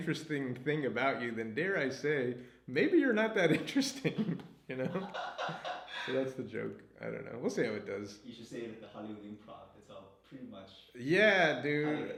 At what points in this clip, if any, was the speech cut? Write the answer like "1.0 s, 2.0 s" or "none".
none